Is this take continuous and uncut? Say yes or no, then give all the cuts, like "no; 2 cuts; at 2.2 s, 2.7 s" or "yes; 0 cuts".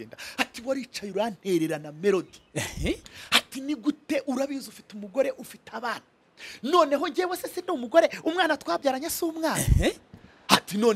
yes; 0 cuts